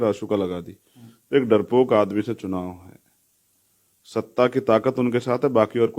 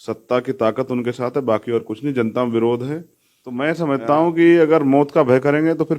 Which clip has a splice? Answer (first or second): second